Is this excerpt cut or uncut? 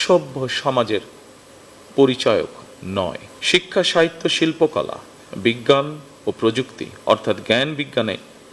uncut